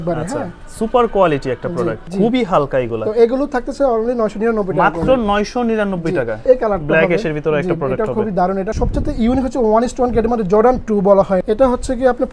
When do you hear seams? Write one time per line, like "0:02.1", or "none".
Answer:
0:02.0
0:06.4
0:08.7
0:11.4